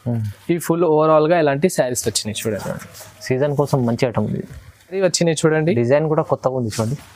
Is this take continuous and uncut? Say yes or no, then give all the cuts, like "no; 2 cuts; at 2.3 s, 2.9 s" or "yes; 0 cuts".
no; 1 cut; at 4.9 s